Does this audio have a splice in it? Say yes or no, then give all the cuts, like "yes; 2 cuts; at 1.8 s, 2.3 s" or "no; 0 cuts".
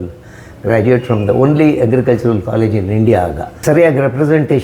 yes; 1 cut; at 3.5 s